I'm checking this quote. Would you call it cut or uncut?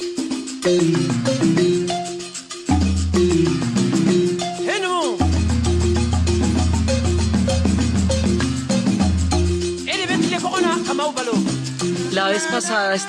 uncut